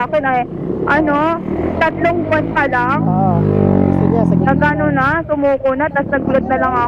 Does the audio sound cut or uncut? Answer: uncut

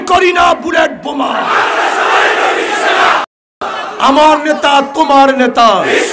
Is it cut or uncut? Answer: cut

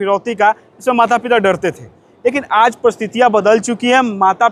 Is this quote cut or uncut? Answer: uncut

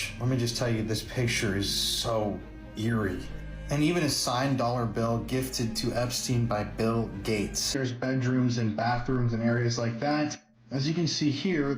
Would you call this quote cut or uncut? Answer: cut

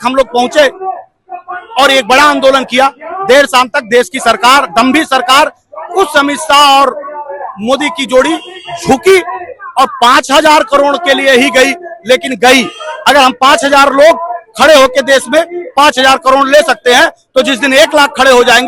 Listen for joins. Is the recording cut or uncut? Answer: uncut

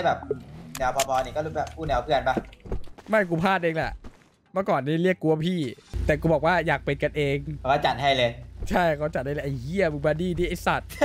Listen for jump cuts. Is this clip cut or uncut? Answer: cut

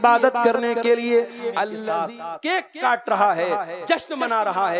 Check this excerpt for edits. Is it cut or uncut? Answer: cut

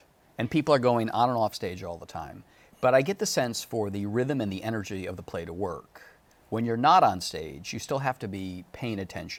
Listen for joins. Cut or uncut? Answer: uncut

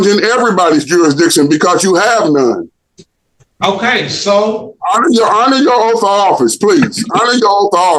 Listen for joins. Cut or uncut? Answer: uncut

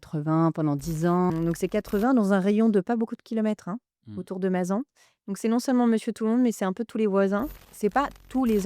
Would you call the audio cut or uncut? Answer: cut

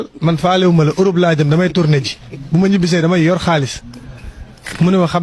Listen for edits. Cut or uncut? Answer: uncut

